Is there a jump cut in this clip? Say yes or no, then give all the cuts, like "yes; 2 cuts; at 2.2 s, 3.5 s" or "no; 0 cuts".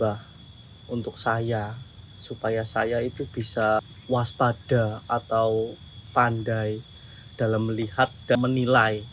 yes; 3 cuts; at 3.9 s, 6.0 s, 8.3 s